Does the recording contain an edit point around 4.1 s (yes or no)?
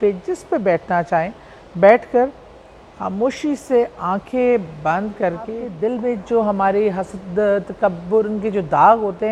no